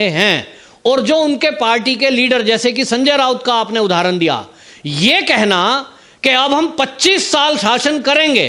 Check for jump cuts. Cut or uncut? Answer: uncut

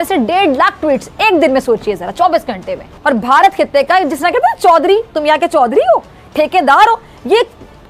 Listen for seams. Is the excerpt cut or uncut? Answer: cut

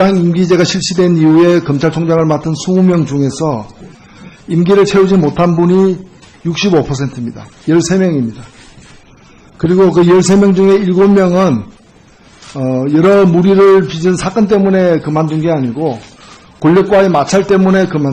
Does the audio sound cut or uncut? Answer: uncut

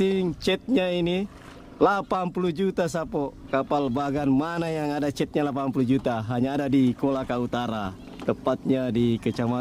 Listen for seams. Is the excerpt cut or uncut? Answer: uncut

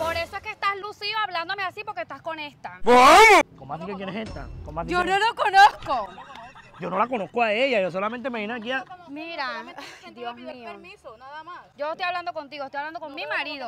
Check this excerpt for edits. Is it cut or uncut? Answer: uncut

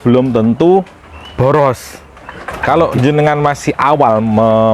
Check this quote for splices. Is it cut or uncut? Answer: cut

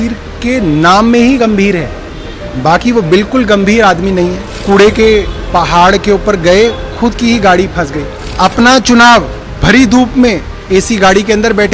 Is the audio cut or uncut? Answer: uncut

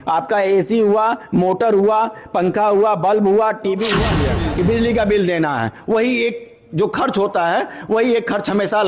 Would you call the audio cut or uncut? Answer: cut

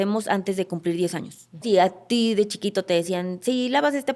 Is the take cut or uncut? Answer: cut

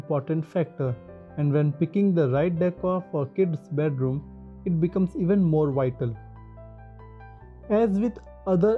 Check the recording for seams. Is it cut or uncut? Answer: cut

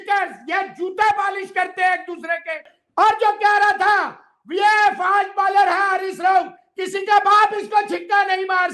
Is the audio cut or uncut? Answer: cut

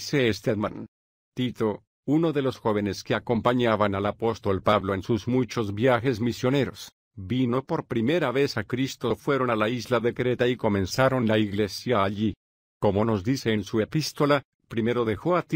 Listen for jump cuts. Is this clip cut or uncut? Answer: uncut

